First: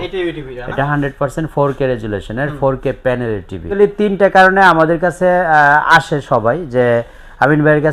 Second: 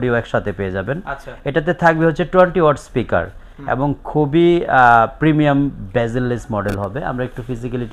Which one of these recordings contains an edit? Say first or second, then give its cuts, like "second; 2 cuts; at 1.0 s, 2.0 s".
first; 1 cut; at 3.8 s